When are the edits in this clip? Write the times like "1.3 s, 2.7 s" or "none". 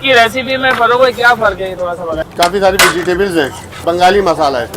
2.1 s, 3.7 s